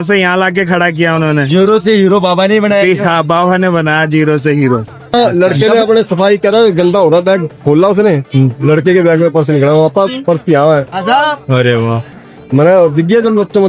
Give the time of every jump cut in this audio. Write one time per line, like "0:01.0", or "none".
0:05.1